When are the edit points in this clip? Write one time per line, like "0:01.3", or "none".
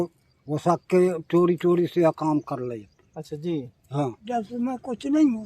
0:04.2